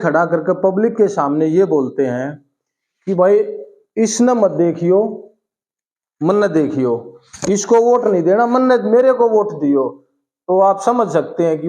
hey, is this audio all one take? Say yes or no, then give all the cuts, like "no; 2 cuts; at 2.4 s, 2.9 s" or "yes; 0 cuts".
yes; 0 cuts